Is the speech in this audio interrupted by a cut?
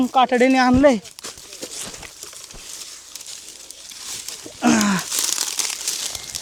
no; 0 cuts

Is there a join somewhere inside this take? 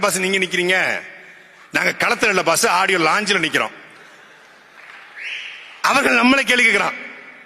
no; 0 cuts

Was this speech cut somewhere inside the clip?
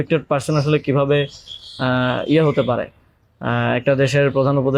no; 0 cuts

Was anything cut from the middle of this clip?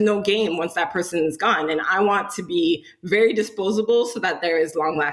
no; 0 cuts

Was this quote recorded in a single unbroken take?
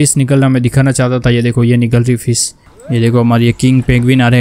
no; 1 cut; at 2.7 s

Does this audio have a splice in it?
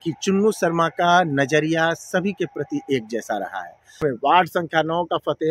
yes; 1 cut; at 4.0 s

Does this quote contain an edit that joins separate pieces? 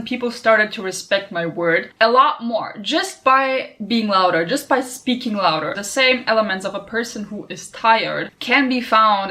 yes; 2 cuts; at 1.9 s, 5.8 s

